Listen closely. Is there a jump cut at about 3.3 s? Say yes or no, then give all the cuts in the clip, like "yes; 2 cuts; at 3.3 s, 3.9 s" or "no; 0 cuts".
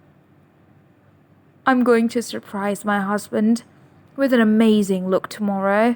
no; 0 cuts